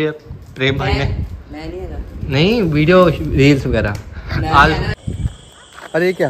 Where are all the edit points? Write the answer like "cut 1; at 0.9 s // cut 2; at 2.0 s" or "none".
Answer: cut 1; at 4.9 s